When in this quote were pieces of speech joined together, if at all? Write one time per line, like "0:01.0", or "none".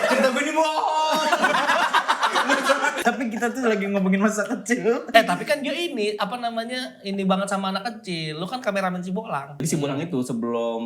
0:03.0
0:05.1
0:09.6